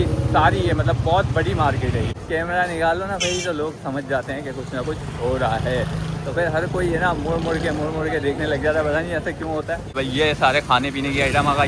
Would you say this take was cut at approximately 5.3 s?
no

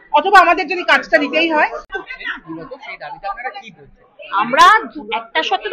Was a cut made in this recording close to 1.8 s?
yes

